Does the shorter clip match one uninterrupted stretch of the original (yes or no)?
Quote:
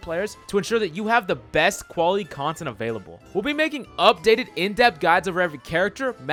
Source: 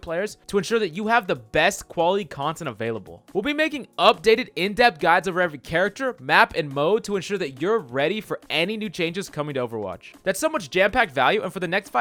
yes